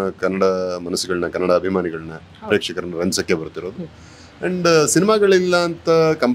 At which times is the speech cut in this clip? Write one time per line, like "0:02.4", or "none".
none

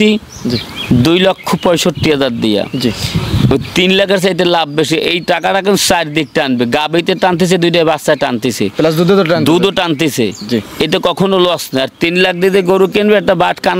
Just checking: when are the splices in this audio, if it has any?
none

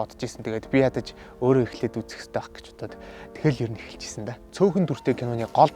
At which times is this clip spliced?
0:04.4

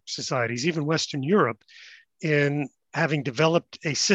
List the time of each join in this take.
0:02.8

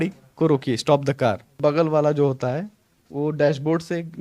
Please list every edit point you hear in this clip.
0:01.6

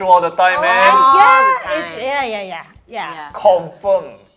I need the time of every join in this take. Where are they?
none

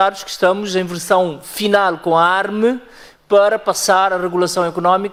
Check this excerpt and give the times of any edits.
none

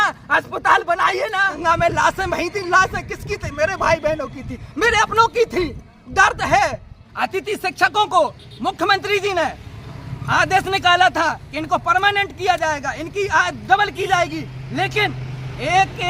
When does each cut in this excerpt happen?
0:01.5
0:07.1

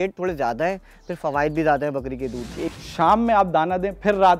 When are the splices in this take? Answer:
0:02.7

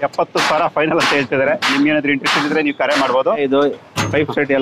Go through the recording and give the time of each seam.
0:03.4

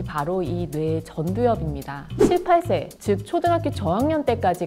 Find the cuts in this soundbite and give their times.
0:02.1

